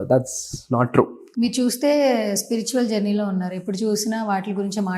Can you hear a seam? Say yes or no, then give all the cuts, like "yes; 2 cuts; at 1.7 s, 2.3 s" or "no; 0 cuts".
yes; 1 cut; at 1.2 s